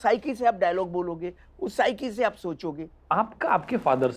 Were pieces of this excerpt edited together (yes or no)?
yes